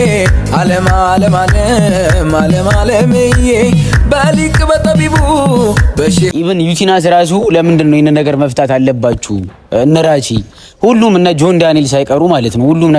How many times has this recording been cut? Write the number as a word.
one